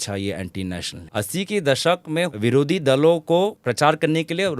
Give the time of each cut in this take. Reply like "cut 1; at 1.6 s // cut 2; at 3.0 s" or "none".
cut 1; at 0.9 s // cut 2; at 2.3 s // cut 3; at 3.6 s